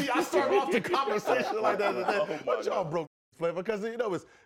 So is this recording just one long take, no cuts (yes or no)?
yes